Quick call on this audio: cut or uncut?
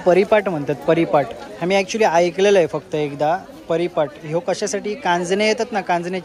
uncut